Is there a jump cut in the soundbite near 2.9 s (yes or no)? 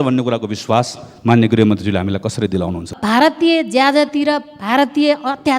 yes